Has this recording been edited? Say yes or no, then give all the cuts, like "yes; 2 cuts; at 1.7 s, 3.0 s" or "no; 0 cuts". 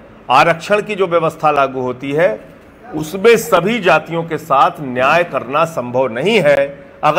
no; 0 cuts